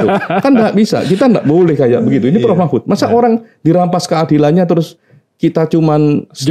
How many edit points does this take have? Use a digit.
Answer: 0